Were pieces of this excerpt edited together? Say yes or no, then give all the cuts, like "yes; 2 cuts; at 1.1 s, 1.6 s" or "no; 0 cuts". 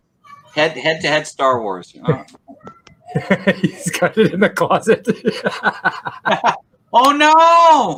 no; 0 cuts